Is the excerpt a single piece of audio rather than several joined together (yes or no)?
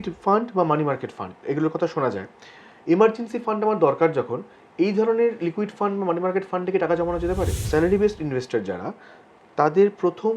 no